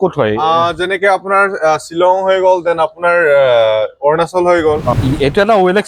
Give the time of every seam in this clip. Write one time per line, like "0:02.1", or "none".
0:04.9